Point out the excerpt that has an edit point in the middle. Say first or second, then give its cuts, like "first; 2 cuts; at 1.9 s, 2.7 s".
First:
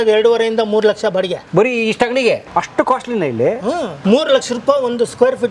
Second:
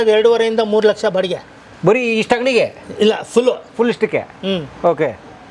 first; 3 cuts; at 1.4 s, 2.4 s, 3.9 s